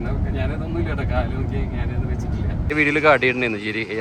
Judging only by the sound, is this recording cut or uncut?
cut